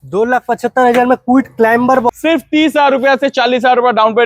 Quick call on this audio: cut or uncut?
cut